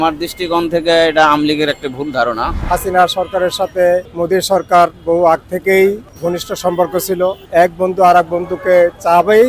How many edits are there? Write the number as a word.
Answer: four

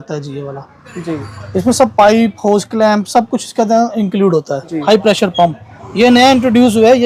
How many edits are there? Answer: one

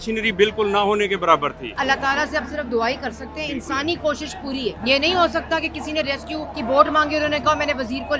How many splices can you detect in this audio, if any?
three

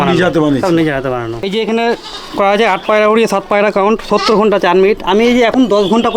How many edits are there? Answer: one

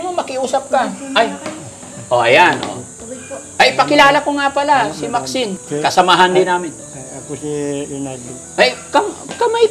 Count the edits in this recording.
one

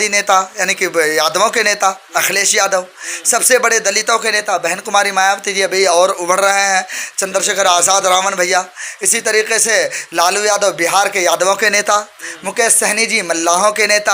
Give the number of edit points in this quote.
zero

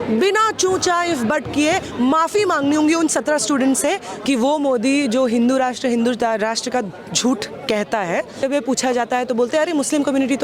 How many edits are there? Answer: two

